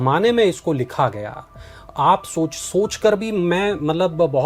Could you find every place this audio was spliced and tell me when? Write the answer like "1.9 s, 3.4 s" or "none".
none